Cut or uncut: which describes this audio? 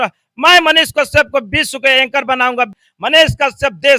cut